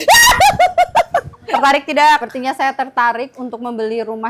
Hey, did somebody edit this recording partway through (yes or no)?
yes